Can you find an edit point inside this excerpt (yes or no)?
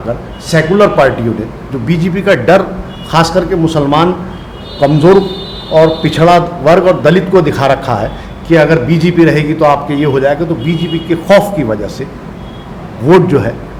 no